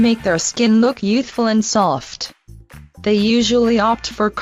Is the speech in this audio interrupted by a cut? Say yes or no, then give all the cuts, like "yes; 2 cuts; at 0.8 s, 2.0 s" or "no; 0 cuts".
yes; 1 cut; at 1.0 s